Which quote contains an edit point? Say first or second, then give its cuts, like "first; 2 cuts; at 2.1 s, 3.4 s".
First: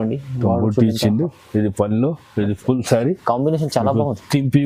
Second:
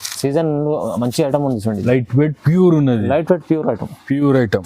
second; 1 cut; at 1.8 s